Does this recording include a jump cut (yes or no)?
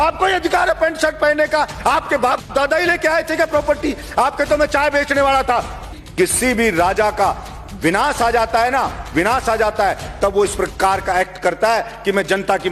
yes